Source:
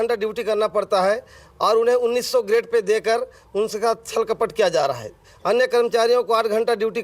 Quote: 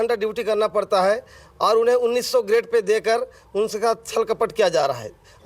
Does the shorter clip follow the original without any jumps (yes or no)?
yes